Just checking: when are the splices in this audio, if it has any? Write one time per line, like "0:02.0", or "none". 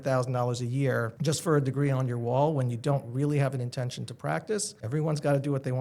0:01.1
0:04.8